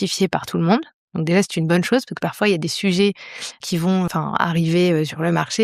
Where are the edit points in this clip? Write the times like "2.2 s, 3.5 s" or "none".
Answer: 3.6 s